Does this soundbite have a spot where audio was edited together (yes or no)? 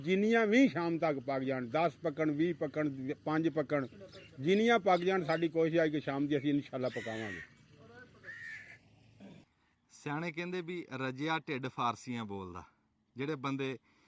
no